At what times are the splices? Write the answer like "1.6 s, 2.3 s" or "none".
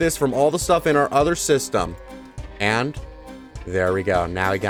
none